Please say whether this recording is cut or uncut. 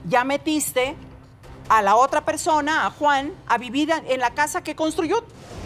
uncut